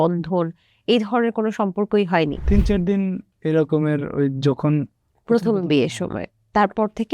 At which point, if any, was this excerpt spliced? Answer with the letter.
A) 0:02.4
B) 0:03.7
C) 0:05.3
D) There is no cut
A